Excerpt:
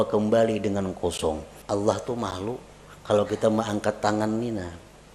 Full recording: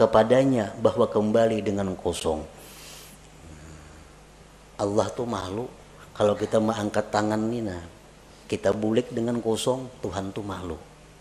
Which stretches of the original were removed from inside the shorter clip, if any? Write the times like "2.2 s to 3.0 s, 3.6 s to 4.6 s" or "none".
2.5 s to 4.6 s